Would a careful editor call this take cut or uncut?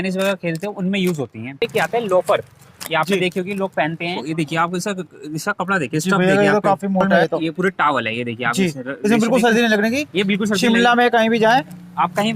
cut